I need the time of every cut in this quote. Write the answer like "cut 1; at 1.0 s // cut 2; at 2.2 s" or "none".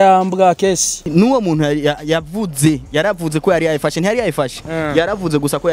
cut 1; at 1.0 s

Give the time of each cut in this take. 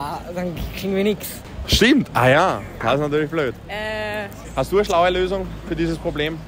cut 1; at 4.4 s

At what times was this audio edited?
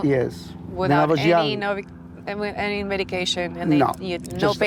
none

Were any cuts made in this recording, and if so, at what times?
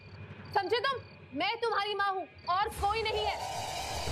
cut 1; at 1.1 s

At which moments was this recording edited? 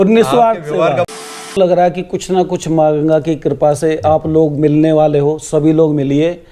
cut 1; at 1.6 s

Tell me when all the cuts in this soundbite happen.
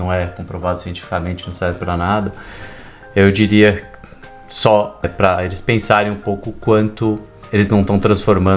cut 1; at 5.1 s // cut 2; at 7.3 s

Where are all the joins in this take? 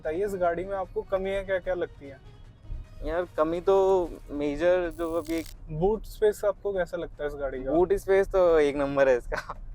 cut 1; at 5.5 s

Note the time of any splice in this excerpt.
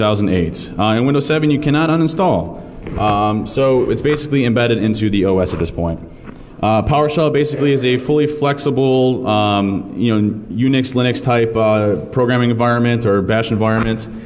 cut 1; at 3.9 s

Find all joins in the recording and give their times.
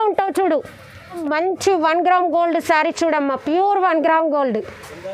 cut 1; at 1.2 s

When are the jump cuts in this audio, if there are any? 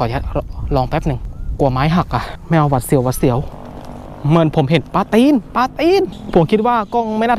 cut 1; at 1.3 s // cut 2; at 2.3 s // cut 3; at 3.5 s // cut 4; at 6.2 s

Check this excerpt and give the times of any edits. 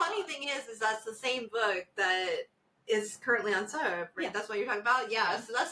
none

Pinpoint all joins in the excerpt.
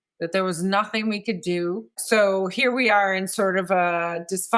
cut 1; at 1.9 s

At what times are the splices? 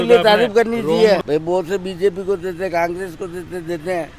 cut 1; at 1.2 s

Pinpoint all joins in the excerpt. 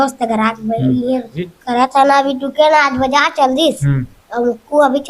cut 1; at 1.4 s

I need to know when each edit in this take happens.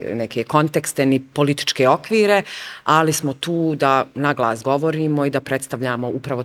none

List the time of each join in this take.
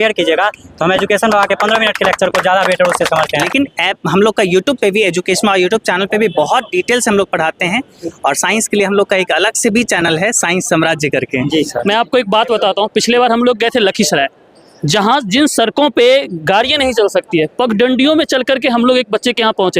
cut 1; at 3.5 s // cut 2; at 11.8 s

